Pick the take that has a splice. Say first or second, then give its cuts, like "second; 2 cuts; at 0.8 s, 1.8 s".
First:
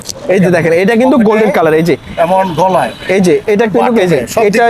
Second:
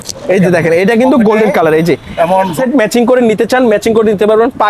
second; 1 cut; at 2.5 s